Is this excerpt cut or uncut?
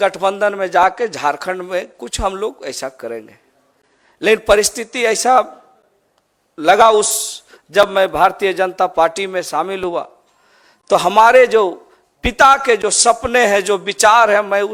uncut